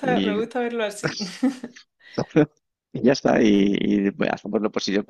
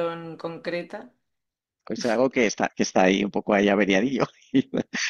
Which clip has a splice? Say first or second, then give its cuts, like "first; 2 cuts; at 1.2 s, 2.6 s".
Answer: second; 1 cut; at 1.8 s